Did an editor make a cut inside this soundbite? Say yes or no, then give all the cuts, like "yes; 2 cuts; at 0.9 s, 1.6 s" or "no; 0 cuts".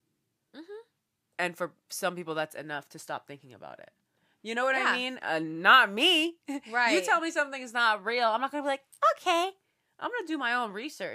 no; 0 cuts